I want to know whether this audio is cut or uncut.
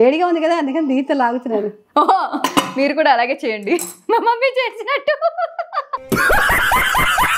uncut